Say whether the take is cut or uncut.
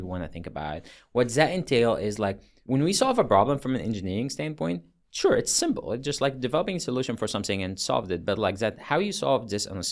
cut